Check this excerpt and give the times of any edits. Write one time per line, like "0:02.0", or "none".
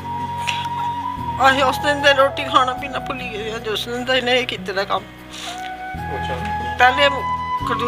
0:01.4